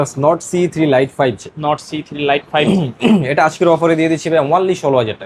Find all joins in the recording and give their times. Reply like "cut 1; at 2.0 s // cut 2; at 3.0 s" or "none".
none